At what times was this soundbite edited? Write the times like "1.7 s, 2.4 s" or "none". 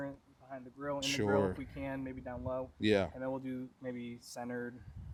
none